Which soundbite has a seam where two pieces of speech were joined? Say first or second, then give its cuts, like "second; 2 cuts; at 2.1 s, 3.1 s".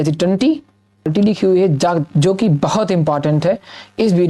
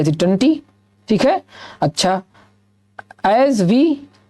first; 1 cut; at 1.1 s